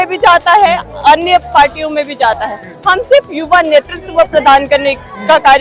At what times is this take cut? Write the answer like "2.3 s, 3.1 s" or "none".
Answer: none